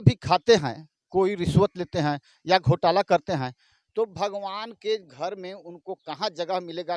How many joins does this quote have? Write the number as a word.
zero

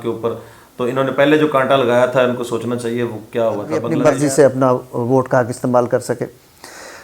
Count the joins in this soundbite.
one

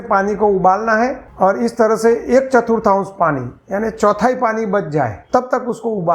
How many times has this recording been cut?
two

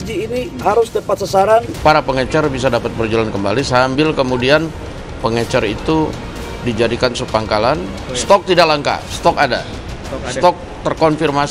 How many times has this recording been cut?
two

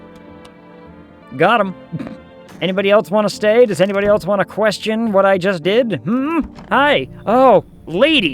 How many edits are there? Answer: two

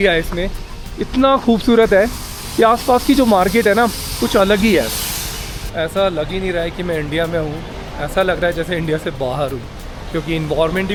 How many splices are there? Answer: zero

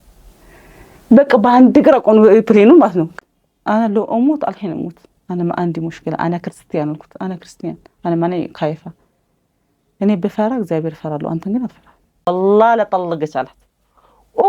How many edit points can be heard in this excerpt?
two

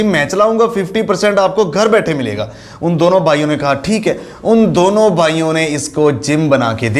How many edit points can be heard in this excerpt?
zero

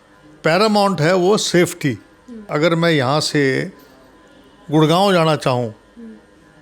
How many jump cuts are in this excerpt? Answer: one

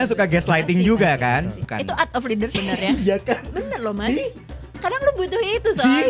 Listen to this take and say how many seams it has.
two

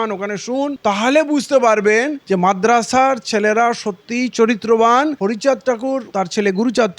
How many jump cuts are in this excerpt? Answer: three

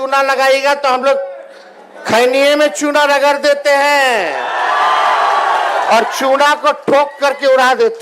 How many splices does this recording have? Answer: zero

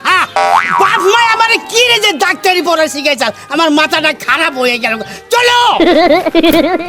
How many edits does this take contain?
zero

